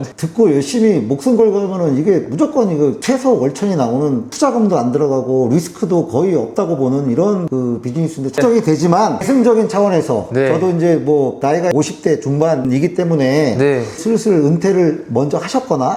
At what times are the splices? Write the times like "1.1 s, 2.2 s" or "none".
none